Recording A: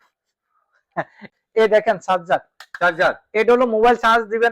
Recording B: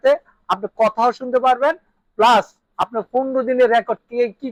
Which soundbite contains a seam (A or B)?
A